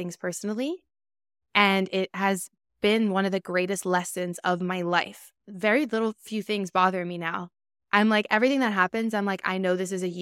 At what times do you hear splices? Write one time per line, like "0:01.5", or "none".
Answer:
0:05.4